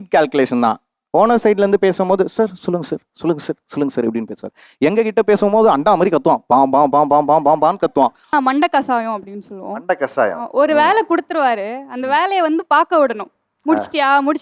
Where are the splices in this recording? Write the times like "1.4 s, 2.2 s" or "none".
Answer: 8.3 s